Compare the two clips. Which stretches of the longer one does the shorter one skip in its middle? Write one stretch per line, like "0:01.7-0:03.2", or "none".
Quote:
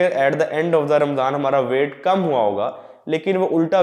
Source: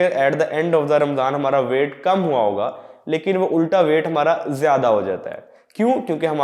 none